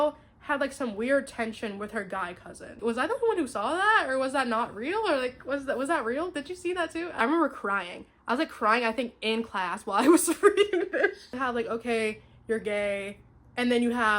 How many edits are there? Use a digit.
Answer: 3